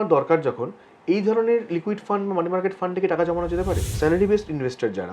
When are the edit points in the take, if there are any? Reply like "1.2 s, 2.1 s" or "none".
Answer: 3.9 s